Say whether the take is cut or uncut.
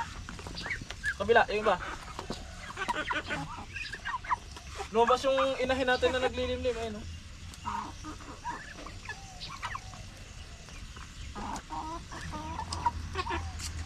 uncut